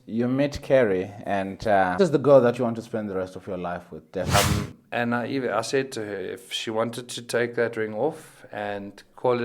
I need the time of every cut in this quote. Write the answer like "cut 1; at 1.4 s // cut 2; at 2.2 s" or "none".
cut 1; at 2.0 s // cut 2; at 4.3 s